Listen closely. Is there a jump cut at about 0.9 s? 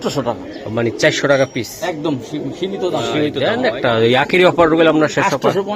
no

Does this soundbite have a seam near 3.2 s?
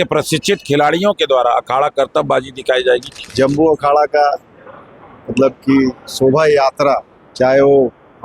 yes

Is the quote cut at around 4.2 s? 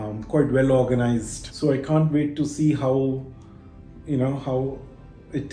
no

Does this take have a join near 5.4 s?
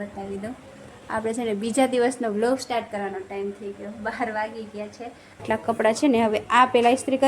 yes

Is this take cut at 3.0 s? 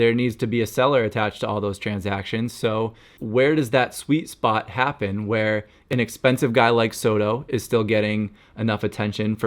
yes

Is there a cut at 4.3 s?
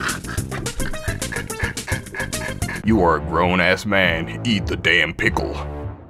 no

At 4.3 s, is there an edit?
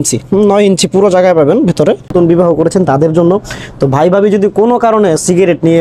no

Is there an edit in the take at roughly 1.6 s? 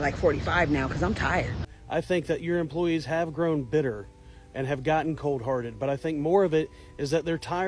yes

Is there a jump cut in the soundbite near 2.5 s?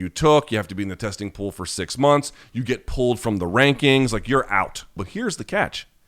no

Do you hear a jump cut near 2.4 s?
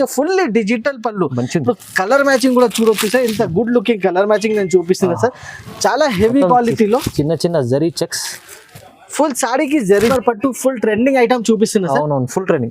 no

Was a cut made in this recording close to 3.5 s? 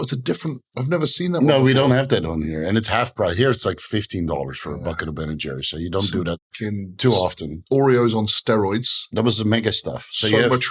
no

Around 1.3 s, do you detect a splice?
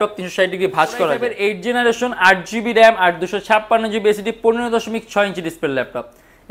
yes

